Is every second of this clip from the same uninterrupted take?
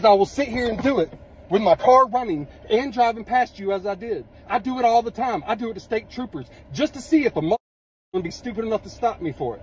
yes; 0 cuts

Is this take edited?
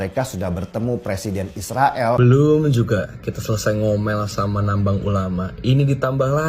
yes; 1 cut; at 2.2 s

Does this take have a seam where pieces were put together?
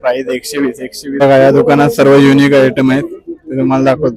yes; 1 cut; at 1.2 s

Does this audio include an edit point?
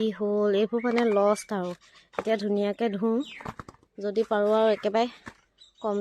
no; 0 cuts

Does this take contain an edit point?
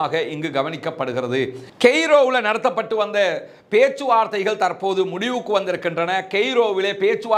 yes; 1 cut; at 1.7 s

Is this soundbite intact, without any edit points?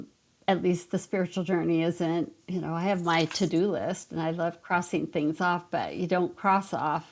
yes; 0 cuts

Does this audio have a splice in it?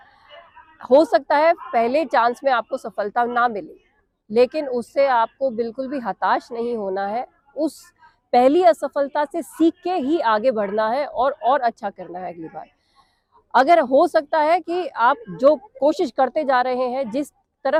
no; 0 cuts

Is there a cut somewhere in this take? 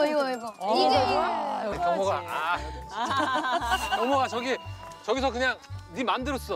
yes; 1 cut; at 1.7 s

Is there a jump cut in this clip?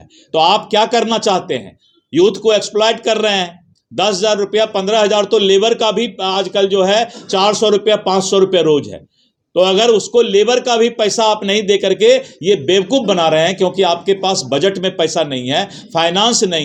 no; 0 cuts

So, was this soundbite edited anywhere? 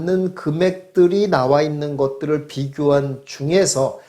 no; 0 cuts

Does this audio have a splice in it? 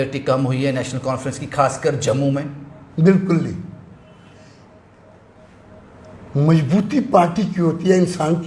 no; 0 cuts

